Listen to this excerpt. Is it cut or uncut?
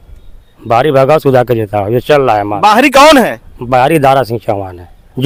uncut